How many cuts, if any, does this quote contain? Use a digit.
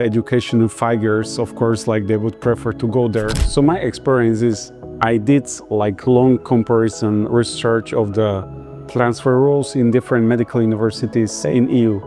1